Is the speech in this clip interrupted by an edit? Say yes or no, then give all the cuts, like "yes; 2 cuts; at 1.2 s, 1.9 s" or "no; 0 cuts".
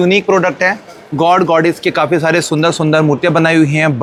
no; 0 cuts